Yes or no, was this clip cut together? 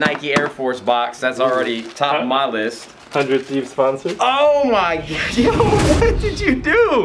no